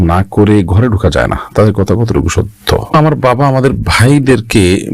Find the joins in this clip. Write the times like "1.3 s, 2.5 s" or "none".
2.9 s